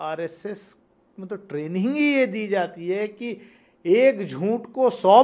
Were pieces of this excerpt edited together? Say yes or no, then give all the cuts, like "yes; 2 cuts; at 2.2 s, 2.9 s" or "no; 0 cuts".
no; 0 cuts